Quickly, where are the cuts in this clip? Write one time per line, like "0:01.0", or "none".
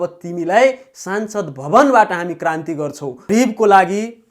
0:03.3

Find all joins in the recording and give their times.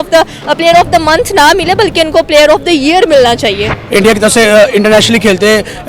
0:03.8

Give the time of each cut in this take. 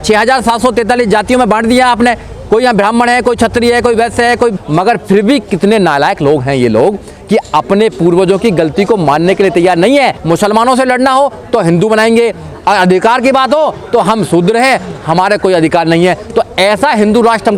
0:04.6
0:10.2

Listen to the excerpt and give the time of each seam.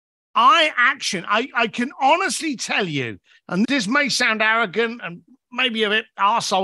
0:03.7

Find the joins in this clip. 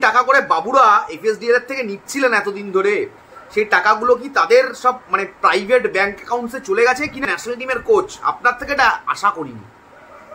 0:07.2

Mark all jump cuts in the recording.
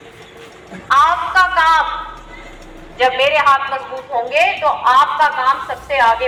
none

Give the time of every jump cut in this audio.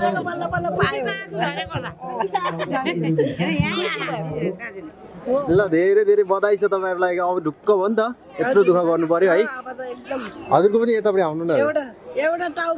0:05.4

